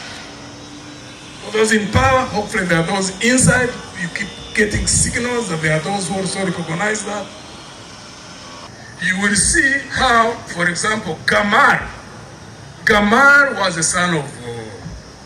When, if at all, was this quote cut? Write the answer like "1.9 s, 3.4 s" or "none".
8.7 s